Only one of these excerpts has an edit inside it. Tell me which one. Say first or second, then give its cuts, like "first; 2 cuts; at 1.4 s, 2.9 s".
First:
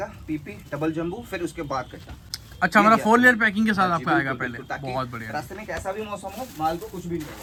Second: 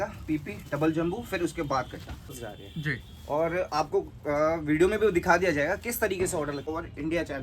second; 2 cuts; at 2.4 s, 6.7 s